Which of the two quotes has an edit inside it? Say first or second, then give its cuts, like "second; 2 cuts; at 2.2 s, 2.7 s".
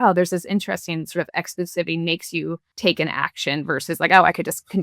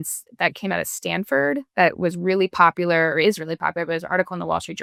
first; 1 cut; at 2.7 s